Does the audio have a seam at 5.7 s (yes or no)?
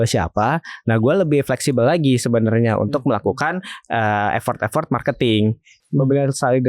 yes